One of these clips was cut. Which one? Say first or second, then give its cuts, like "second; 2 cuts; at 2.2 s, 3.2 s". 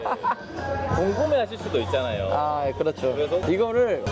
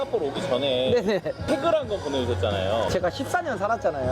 second; 1 cut; at 2.9 s